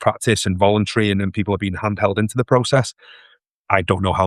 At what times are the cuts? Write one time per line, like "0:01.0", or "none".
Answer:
none